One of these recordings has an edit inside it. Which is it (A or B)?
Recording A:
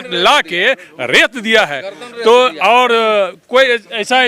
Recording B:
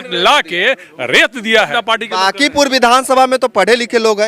B